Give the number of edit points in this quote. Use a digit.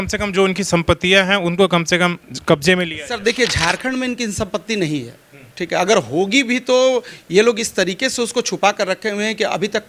0